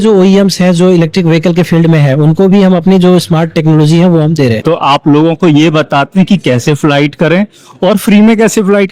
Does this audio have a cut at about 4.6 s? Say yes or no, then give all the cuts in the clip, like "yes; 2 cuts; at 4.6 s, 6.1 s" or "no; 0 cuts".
yes; 1 cut; at 4.6 s